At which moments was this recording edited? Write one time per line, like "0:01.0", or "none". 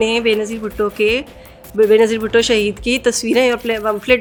none

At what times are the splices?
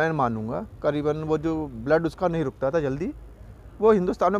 none

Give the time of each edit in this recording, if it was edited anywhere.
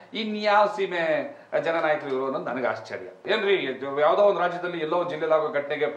0:03.2

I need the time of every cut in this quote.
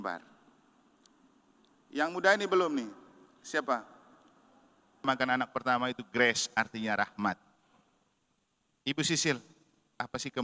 0:05.1

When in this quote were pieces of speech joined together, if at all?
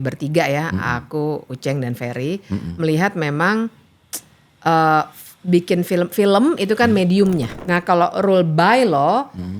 0:07.5

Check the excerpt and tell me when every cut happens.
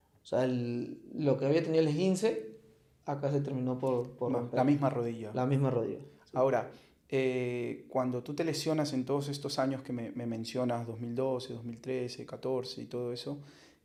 none

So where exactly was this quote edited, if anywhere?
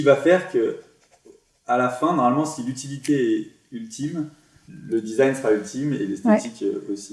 none

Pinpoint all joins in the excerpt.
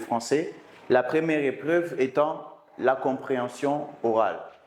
none

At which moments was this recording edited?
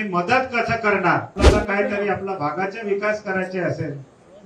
0:01.4

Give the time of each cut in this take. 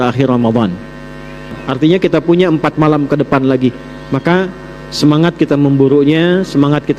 0:01.6

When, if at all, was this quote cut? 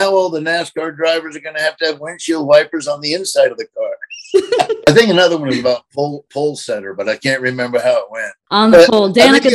0:04.9
0:08.3

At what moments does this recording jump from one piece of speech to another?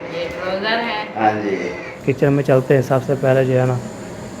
0:01.9

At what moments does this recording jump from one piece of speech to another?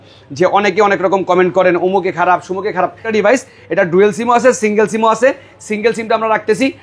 0:03.1

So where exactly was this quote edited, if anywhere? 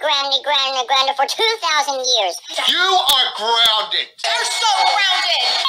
0:02.5

